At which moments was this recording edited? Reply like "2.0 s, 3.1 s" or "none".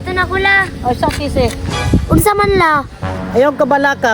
3.1 s

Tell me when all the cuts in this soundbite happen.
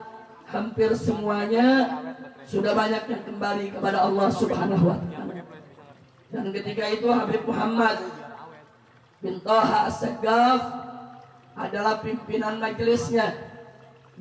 none

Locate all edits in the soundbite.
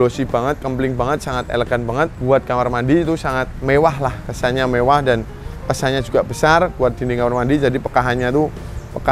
2.2 s, 3.5 s

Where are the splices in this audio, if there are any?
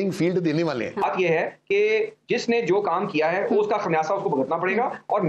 1.0 s

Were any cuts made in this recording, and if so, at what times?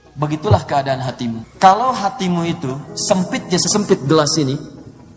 1.5 s

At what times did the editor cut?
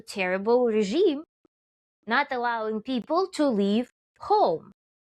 none

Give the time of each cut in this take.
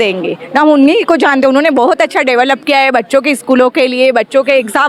none

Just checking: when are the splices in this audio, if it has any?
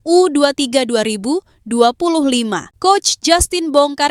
2.7 s

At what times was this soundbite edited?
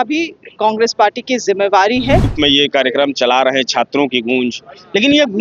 2.3 s

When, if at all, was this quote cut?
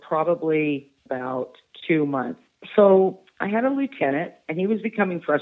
1.0 s, 2.4 s, 4.4 s

